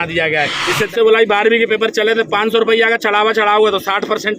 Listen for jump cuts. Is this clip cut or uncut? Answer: cut